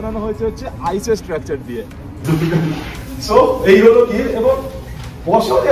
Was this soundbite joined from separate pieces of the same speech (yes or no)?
yes